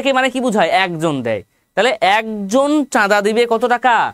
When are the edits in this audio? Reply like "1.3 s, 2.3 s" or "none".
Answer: none